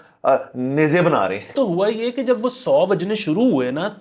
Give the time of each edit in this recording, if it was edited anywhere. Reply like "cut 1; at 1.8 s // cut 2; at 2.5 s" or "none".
cut 1; at 1.5 s